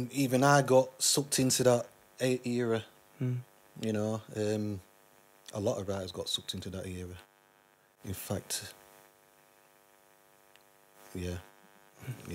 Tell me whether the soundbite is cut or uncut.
uncut